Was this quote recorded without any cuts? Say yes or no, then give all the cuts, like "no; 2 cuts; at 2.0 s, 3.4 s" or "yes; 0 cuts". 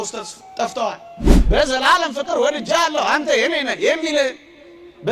no; 1 cut; at 1.3 s